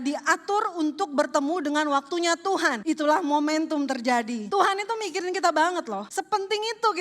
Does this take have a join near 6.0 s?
yes; 3 cuts; at 2.8 s, 4.5 s, 6.0 s

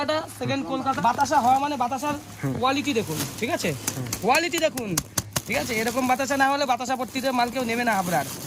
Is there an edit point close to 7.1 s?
no; 1 cut; at 1.0 s

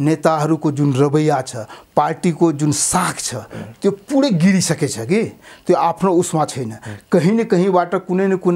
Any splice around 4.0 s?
no; 0 cuts

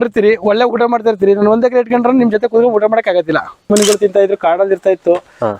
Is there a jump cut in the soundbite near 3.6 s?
yes; 1 cut; at 3.6 s

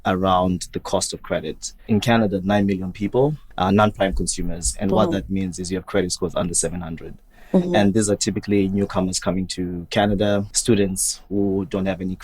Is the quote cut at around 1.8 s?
yes; 3 cuts; at 1.8 s, 3.5 s, 10.5 s

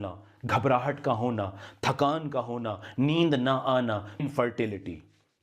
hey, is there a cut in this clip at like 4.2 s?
yes; 1 cut; at 4.2 s

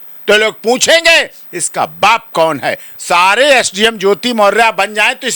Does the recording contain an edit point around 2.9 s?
yes; 1 cut; at 2.9 s

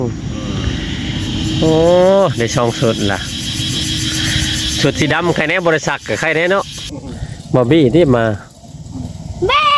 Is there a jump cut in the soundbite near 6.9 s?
yes; 1 cut; at 6.9 s

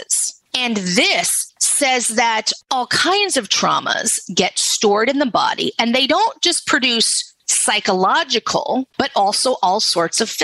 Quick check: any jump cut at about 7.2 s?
no; 2 cuts; at 2.5 s, 8.9 s

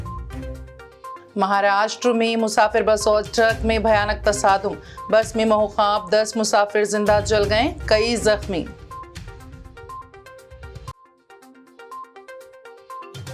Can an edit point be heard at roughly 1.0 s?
yes; 1 cut; at 1.0 s

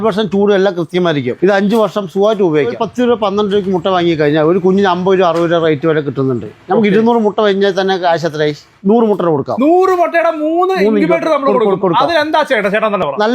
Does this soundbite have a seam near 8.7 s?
yes; 3 cuts; at 1.3 s, 2.8 s, 8.7 s

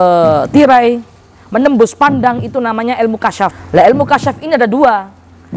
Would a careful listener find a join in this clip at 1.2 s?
no; 1 cut; at 3.6 s

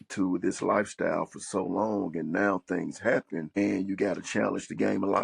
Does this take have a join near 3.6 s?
yes; 1 cut; at 3.6 s

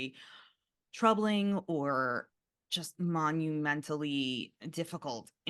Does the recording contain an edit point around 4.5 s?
yes; 2 cuts; at 2.3 s, 4.5 s

